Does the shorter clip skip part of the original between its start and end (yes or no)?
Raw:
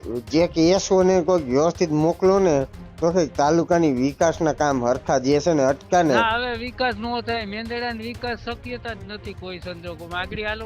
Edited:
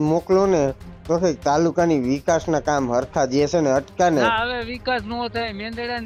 no